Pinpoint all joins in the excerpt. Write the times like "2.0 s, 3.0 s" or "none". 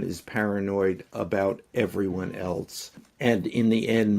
3.1 s